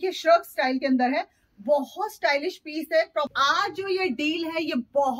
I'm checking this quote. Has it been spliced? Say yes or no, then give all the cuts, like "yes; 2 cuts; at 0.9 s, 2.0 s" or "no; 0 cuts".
yes; 1 cut; at 3.3 s